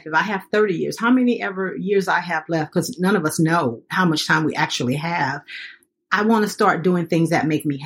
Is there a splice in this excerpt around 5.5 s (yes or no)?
no